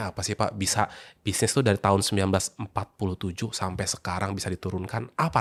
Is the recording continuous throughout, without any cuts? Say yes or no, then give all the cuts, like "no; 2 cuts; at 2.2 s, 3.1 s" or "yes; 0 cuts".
yes; 0 cuts